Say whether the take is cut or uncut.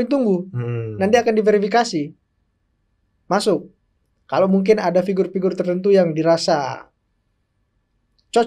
uncut